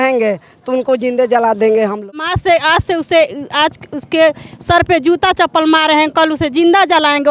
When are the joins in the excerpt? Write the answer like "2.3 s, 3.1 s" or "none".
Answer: 2.3 s